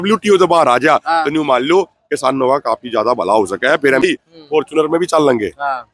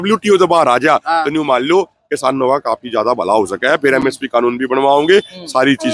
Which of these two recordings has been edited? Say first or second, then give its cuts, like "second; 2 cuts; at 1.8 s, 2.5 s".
first; 1 cut; at 4.0 s